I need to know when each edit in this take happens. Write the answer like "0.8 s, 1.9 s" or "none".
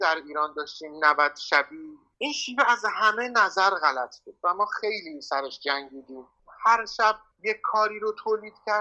2.1 s